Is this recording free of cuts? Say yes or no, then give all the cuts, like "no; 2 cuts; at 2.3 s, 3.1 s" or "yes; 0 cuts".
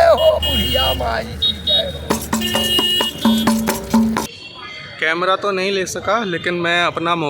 no; 1 cut; at 4.2 s